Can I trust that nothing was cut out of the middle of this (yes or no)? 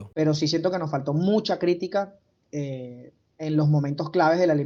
yes